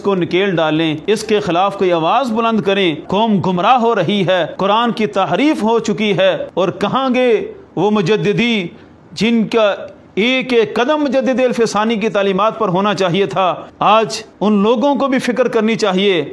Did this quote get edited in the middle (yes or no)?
yes